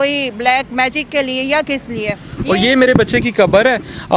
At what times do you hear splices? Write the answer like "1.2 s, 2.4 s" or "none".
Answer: 2.3 s